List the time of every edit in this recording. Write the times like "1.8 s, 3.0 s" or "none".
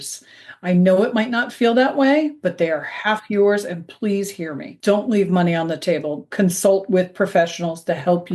6.3 s